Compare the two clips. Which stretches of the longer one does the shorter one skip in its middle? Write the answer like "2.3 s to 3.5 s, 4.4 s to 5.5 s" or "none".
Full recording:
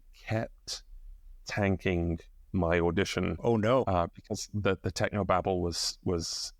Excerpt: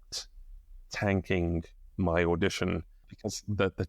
3.5 s to 4.0 s